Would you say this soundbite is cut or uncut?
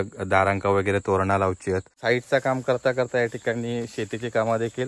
cut